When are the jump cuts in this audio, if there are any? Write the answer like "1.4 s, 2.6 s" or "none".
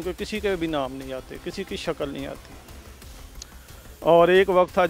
none

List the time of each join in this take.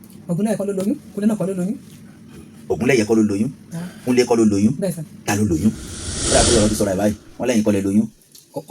6.2 s

